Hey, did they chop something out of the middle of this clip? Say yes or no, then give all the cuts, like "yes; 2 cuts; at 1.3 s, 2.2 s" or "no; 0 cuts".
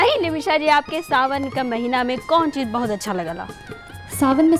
no; 0 cuts